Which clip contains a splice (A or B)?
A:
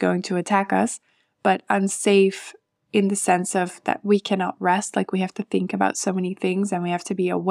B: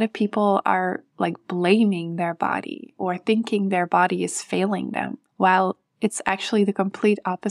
B